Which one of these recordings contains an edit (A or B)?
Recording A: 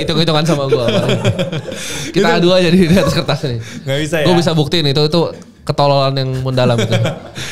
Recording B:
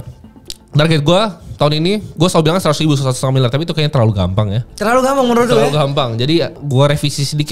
B